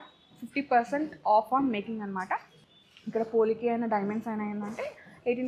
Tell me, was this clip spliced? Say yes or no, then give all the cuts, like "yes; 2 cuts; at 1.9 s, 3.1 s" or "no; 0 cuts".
yes; 1 cut; at 2.6 s